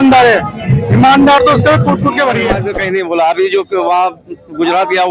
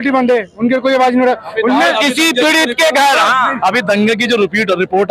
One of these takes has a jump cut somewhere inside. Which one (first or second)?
first